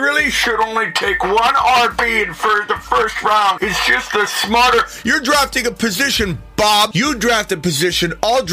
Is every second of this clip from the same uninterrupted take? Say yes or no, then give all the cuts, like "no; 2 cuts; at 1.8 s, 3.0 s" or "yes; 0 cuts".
no; 2 cuts; at 3.6 s, 6.9 s